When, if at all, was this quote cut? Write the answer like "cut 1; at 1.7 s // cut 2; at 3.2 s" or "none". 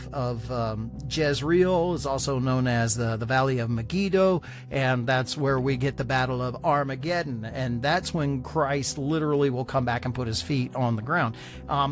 none

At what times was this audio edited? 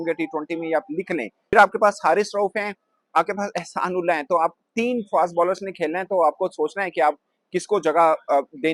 cut 1; at 1.5 s

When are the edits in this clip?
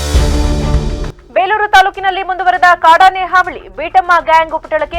cut 1; at 1.1 s

